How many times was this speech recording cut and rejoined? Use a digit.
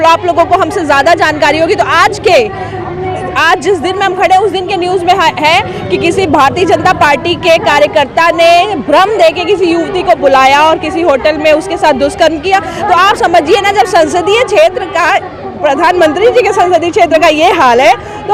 0